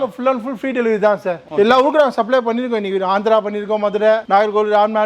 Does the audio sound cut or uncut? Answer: cut